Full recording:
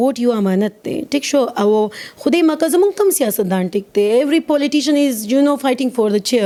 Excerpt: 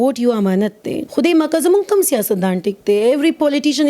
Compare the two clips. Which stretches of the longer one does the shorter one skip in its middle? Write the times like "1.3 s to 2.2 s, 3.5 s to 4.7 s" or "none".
1.0 s to 2.0 s